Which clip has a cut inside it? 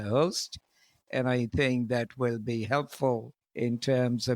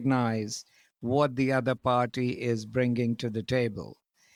first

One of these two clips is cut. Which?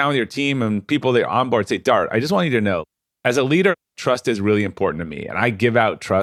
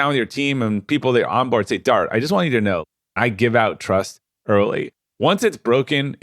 second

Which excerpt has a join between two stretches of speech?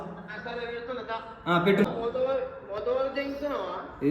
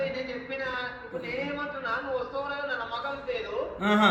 first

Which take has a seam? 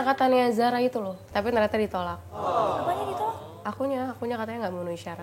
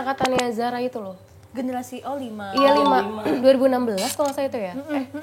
first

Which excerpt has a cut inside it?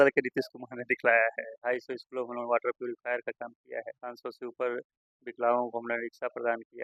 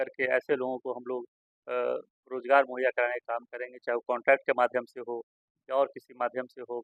first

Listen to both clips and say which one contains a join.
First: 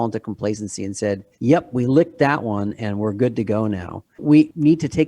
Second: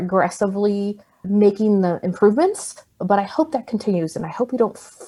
first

